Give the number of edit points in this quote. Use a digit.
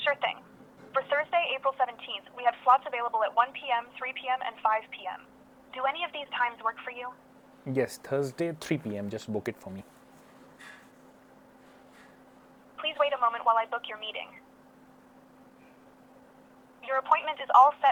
0